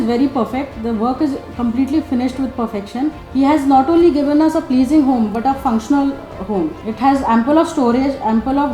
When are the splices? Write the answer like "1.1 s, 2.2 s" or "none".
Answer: 3.2 s, 6.8 s